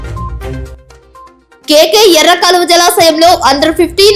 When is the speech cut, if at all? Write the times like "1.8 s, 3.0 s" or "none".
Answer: 0.9 s